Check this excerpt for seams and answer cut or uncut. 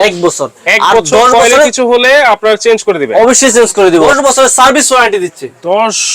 cut